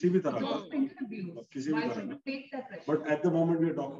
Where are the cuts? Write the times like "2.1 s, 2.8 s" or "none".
none

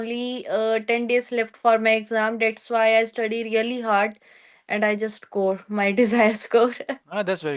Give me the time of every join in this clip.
none

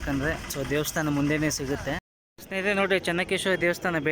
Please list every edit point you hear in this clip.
2.1 s

